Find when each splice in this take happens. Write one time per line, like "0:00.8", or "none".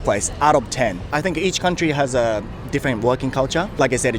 0:01.1